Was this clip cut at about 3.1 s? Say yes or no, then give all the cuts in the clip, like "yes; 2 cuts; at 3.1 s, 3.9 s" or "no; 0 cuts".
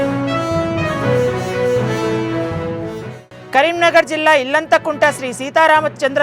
yes; 1 cut; at 3.1 s